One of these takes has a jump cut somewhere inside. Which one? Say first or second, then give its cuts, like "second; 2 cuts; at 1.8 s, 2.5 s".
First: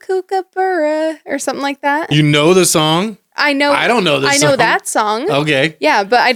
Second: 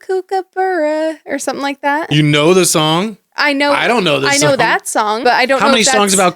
second; 1 cut; at 5.2 s